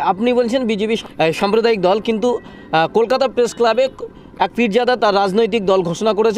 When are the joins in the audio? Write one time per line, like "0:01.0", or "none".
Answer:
0:01.0